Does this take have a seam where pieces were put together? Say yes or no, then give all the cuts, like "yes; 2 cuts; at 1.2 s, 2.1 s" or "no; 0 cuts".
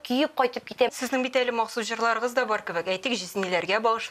yes; 1 cut; at 0.9 s